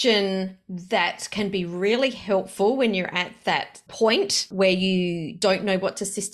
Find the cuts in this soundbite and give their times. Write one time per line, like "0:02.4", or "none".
0:03.8
0:04.5
0:05.4